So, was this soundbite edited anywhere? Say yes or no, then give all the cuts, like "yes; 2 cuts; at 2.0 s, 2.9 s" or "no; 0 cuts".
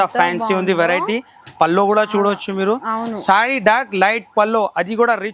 no; 0 cuts